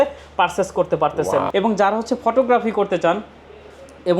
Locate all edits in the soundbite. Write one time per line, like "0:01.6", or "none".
0:01.5